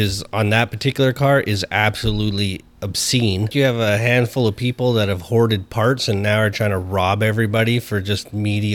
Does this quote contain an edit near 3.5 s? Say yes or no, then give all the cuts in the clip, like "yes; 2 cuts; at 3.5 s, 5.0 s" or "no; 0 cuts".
yes; 1 cut; at 3.5 s